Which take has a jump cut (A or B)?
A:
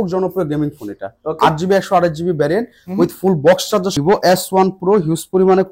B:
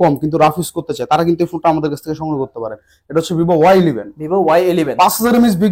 A